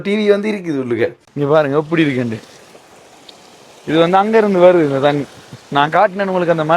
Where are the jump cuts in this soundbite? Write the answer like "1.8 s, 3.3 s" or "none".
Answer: 1.2 s